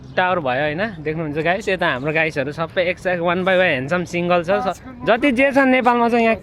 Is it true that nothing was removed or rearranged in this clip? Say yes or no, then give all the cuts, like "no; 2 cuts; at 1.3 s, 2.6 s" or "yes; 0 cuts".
yes; 0 cuts